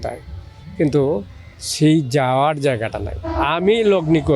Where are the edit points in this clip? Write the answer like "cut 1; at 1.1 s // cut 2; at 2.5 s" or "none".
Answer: cut 1; at 3.2 s